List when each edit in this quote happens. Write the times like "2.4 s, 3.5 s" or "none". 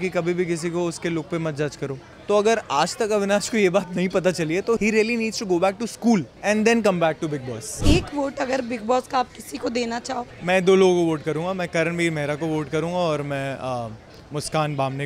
2.1 s, 4.8 s, 6.3 s, 7.7 s, 10.3 s